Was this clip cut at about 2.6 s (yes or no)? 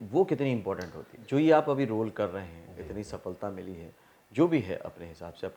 no